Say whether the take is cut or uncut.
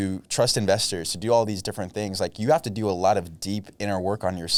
uncut